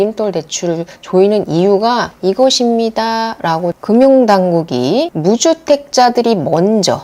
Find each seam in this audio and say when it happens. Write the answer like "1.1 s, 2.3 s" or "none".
3.8 s